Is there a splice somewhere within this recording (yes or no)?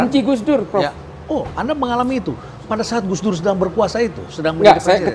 no